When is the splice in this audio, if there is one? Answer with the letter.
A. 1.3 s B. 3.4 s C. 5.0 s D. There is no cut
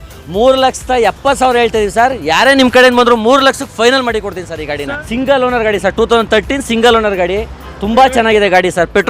C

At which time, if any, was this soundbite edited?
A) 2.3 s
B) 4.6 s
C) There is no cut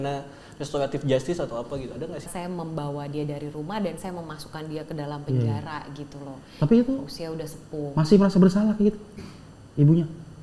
A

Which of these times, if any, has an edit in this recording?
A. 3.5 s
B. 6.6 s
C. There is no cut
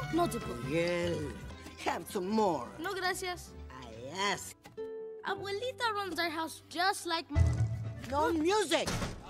C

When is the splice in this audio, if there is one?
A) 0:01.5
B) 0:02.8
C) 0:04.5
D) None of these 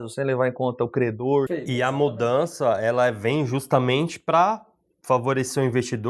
A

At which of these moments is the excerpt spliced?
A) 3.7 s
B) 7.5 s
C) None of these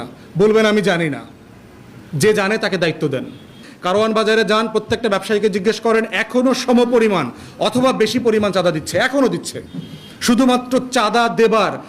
A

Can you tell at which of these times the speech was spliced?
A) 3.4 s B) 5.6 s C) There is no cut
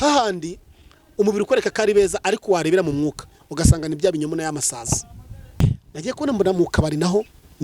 B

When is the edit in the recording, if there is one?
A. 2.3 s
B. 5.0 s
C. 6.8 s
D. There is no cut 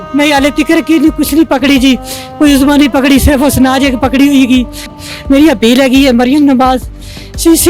B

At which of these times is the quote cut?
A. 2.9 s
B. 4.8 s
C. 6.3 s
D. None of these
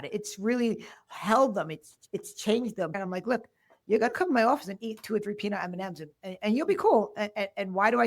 A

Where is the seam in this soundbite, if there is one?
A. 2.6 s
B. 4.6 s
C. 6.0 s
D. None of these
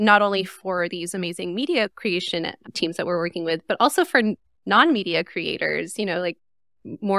D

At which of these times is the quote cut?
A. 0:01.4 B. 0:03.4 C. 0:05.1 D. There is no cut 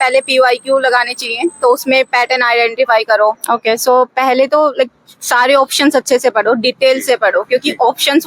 B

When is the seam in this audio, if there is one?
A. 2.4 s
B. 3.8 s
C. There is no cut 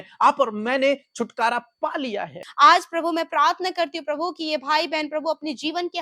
A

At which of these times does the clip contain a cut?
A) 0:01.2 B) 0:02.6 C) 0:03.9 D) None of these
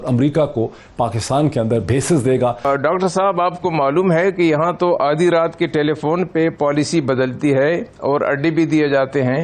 B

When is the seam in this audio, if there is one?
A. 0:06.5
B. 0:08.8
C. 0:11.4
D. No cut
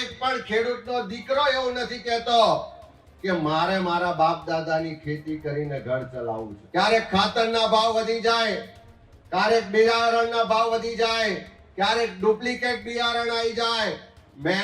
A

